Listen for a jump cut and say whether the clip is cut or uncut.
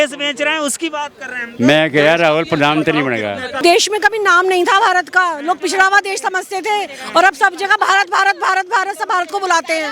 cut